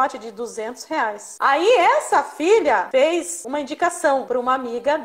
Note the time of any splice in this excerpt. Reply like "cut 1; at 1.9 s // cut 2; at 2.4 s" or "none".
cut 1; at 1.3 s // cut 2; at 3.1 s // cut 3; at 4.3 s